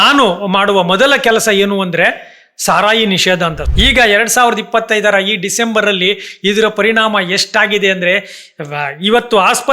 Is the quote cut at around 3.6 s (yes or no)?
yes